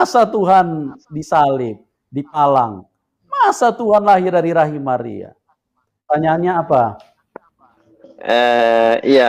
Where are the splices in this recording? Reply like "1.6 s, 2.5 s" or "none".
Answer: 6.0 s